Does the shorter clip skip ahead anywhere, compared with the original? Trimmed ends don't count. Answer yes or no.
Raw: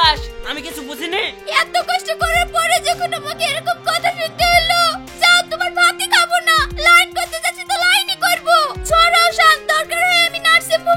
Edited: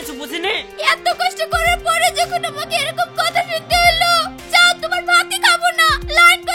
no